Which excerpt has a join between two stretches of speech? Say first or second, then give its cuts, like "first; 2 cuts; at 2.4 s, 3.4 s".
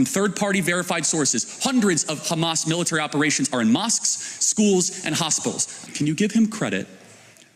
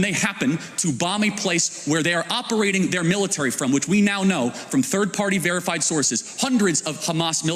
first; 1 cut; at 5.8 s